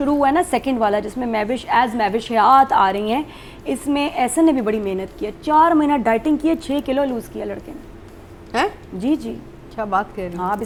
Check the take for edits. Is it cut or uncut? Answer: uncut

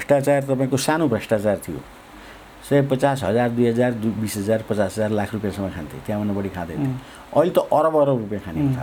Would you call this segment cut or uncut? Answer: uncut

